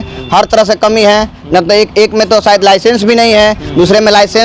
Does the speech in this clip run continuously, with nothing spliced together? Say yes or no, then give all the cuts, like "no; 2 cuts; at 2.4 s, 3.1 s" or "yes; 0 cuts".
yes; 0 cuts